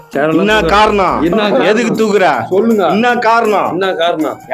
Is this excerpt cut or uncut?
uncut